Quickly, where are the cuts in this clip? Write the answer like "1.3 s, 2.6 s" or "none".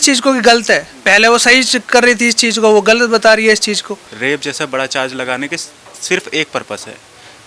4.1 s